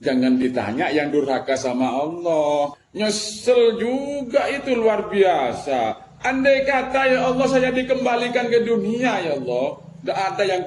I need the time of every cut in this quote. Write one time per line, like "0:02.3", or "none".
0:02.8